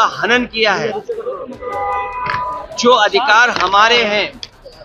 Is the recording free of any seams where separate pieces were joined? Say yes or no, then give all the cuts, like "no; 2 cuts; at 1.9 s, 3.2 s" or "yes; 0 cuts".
yes; 0 cuts